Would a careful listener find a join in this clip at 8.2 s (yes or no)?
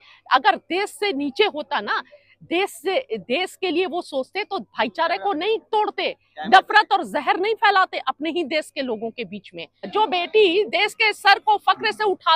no